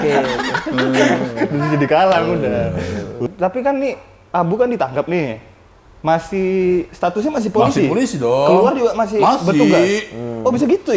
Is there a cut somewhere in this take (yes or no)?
yes